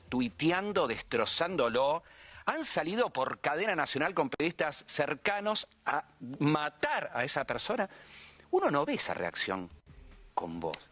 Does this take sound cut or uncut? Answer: uncut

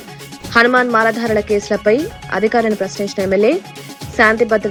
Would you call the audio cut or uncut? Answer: uncut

